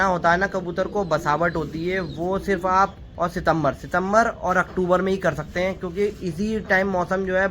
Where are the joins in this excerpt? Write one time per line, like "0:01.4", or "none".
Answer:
0:03.0